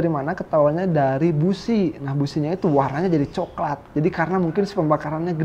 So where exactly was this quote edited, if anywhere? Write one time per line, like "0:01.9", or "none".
none